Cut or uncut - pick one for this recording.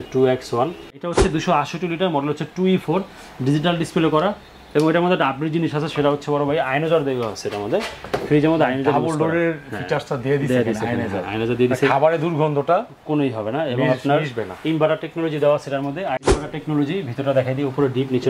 cut